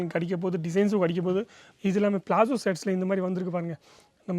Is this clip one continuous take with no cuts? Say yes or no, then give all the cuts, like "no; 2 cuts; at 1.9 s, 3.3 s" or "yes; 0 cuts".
no; 1 cut; at 1.6 s